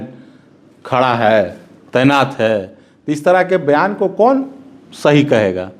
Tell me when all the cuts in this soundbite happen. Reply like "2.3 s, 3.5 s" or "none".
none